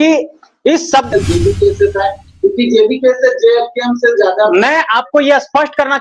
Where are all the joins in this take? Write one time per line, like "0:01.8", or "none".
0:01.1